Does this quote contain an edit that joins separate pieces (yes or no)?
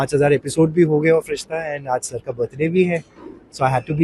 no